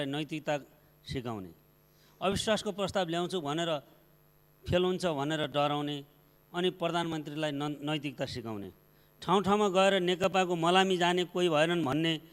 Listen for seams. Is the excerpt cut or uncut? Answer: uncut